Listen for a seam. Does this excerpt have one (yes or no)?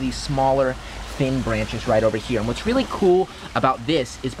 no